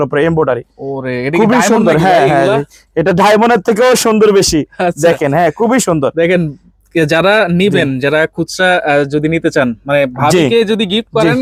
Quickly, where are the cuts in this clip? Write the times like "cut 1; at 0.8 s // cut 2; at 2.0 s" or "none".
none